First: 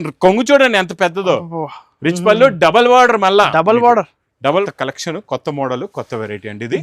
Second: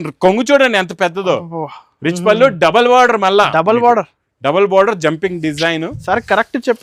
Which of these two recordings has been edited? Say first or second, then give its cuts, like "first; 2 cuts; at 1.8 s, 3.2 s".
first; 1 cut; at 4.6 s